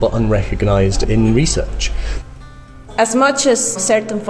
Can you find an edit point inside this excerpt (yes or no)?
yes